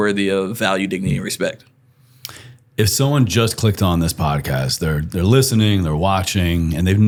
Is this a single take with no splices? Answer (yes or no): yes